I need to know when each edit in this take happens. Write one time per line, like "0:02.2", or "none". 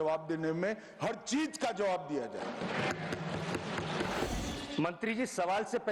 0:04.3